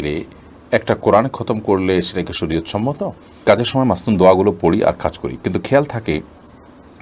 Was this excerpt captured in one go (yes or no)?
no